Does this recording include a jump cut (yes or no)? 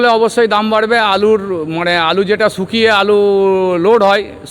no